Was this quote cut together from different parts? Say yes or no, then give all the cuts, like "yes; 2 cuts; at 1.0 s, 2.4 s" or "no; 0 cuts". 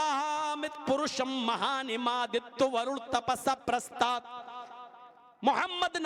no; 0 cuts